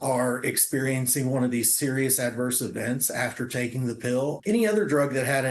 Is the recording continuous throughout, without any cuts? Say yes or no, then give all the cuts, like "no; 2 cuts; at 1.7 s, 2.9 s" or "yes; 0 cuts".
no; 1 cut; at 4.4 s